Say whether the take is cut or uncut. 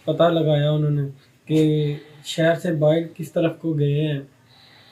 uncut